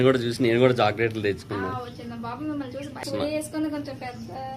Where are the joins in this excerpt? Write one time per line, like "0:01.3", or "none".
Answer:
0:03.0